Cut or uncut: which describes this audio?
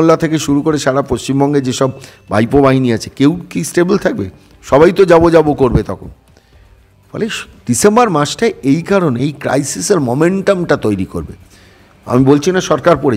uncut